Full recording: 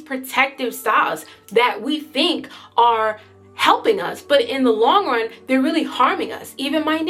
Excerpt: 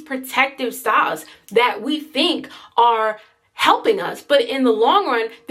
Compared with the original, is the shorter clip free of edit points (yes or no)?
yes